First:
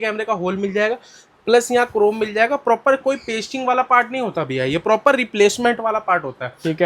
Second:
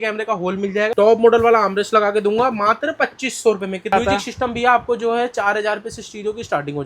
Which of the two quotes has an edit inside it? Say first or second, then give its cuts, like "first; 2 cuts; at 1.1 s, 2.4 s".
second; 2 cuts; at 0.9 s, 3.9 s